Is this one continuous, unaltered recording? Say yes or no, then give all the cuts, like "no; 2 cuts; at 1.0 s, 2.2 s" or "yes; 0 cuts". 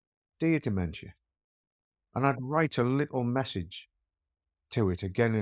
yes; 0 cuts